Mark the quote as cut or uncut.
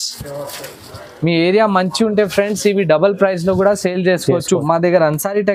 cut